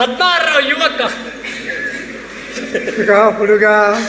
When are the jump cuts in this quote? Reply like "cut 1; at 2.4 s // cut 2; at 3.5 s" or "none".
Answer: cut 1; at 2.5 s

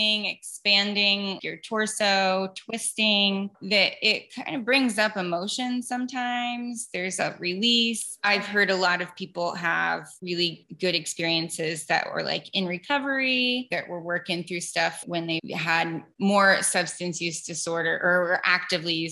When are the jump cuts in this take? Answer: cut 1; at 1.4 s // cut 2; at 8.2 s // cut 3; at 10.5 s // cut 4; at 15.1 s

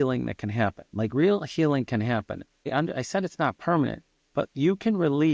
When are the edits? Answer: cut 1; at 2.5 s

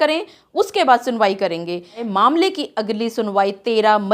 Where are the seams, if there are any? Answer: cut 1; at 2.1 s

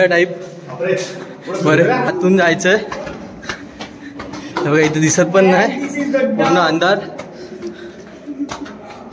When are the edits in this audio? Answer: cut 1; at 2.1 s

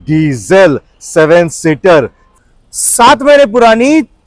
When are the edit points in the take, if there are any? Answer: cut 1; at 2.2 s

